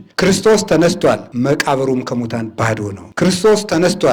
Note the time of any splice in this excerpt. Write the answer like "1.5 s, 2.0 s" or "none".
1.3 s, 3.0 s